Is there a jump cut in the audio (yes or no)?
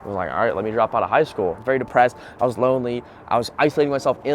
yes